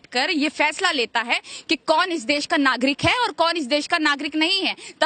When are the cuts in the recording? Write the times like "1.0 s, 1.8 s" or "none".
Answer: none